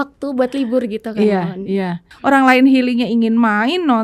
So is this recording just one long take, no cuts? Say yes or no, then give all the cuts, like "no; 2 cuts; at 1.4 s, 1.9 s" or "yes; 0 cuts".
no; 1 cut; at 2.1 s